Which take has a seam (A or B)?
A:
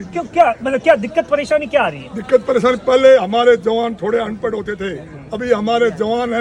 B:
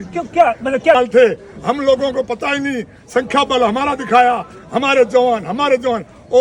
B